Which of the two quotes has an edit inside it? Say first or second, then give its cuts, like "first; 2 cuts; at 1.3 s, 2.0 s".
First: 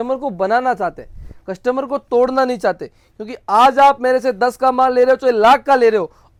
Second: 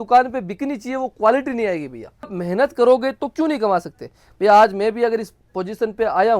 second; 1 cut; at 2.4 s